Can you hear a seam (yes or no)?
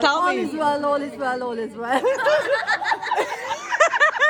no